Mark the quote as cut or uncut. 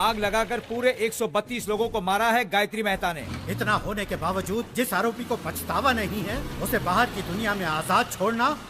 cut